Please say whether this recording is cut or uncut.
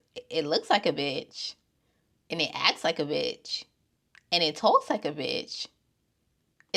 uncut